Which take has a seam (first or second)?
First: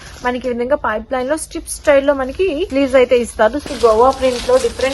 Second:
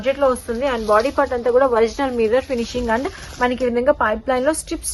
first